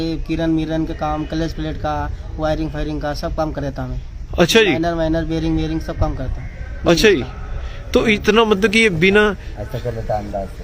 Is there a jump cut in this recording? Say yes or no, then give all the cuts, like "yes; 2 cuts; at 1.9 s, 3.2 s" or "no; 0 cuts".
no; 0 cuts